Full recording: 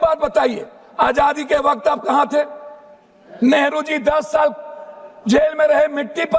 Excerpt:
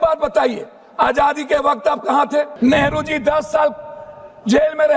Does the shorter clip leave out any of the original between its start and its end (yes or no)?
yes